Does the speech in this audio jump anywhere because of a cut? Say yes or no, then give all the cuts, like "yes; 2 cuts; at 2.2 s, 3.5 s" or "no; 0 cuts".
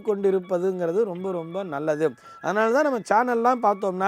no; 0 cuts